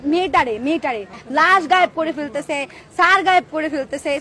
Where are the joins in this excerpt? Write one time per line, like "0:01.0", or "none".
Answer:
0:01.1